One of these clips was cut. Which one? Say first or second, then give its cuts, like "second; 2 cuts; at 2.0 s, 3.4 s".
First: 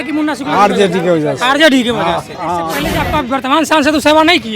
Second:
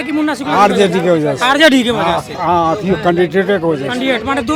first; 1 cut; at 2.8 s